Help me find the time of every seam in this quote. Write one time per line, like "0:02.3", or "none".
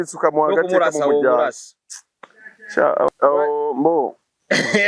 0:03.1